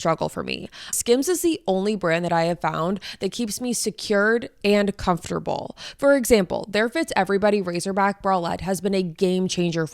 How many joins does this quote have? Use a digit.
1